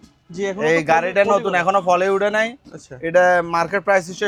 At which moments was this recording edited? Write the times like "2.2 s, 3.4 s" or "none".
none